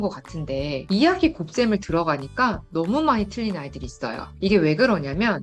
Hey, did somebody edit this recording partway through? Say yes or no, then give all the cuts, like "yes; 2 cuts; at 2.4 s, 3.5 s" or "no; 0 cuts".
yes; 2 cuts; at 0.8 s, 4.2 s